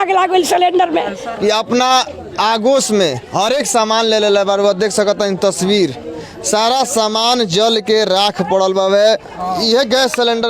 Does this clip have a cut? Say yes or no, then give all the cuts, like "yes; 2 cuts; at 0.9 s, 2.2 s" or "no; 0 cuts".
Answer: yes; 2 cuts; at 1.2 s, 9.3 s